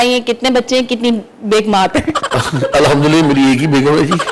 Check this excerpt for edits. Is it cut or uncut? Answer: uncut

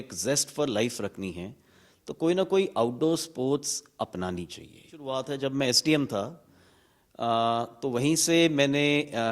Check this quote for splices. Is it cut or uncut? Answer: cut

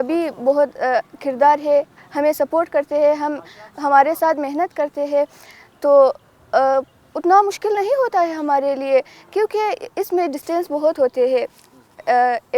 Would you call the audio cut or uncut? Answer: uncut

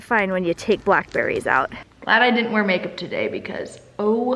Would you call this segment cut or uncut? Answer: cut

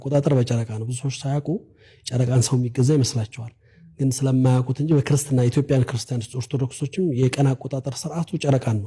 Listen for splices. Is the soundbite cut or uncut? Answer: uncut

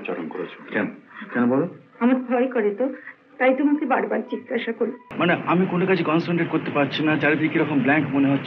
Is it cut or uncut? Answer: cut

